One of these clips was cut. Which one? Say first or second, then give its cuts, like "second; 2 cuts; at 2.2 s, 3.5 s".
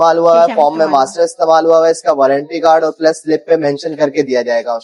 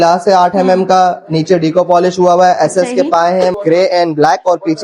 second; 1 cut; at 3.6 s